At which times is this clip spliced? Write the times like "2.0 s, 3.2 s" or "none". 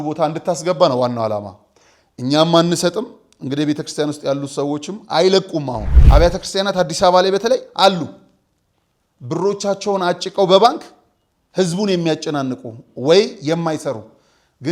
5.9 s